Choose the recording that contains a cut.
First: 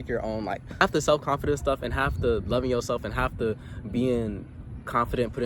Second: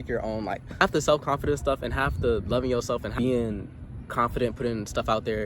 second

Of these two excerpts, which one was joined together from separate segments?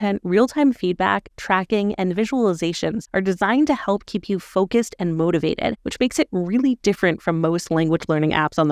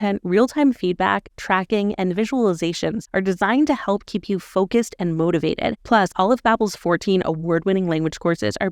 second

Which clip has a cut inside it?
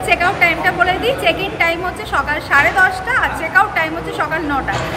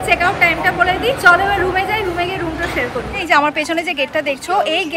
second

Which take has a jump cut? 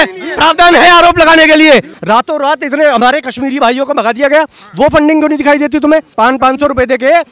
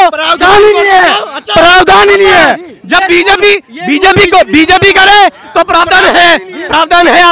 first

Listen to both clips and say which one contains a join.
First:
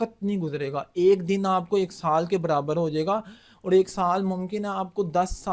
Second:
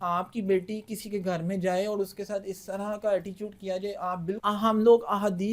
second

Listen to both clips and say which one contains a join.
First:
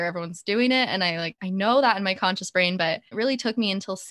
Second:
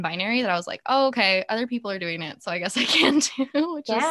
first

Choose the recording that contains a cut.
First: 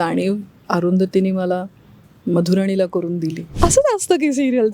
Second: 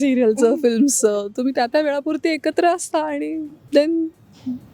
first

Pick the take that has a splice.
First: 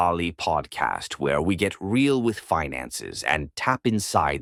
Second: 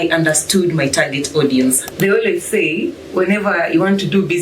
second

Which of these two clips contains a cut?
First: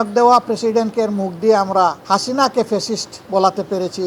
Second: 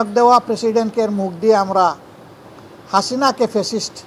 first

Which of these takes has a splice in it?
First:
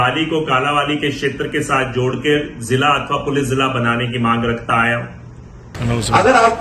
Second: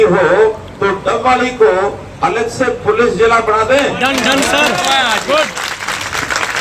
first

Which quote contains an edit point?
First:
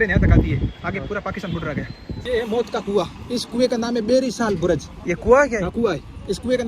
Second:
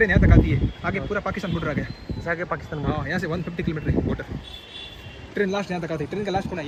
first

